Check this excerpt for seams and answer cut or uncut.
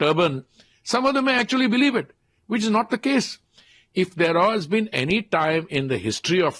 uncut